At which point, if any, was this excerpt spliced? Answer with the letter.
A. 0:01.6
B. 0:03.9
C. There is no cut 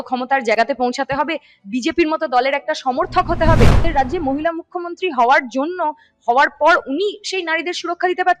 B